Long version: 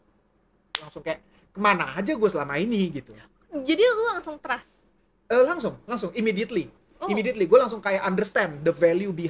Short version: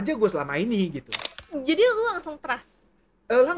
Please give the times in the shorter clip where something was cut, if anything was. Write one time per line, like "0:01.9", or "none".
none